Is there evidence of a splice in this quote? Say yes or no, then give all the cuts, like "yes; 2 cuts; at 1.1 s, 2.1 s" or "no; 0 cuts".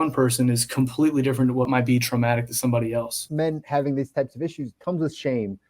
yes; 3 cuts; at 1.7 s, 3.2 s, 4.7 s